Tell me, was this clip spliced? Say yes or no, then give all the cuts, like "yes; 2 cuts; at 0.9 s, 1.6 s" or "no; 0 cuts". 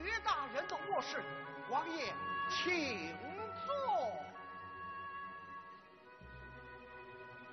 no; 0 cuts